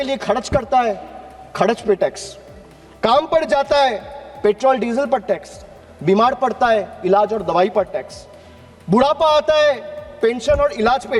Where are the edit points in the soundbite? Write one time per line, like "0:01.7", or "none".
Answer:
none